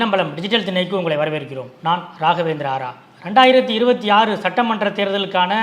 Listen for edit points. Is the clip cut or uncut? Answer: uncut